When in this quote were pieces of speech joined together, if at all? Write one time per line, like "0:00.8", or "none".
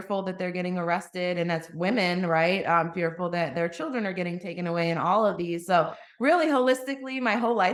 none